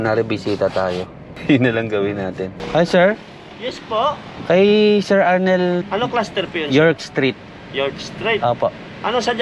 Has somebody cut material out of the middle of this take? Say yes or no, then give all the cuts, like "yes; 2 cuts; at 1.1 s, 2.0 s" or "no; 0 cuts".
no; 0 cuts